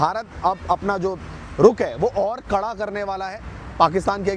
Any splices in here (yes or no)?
no